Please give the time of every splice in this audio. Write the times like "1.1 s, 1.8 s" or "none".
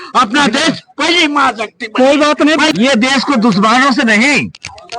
2.7 s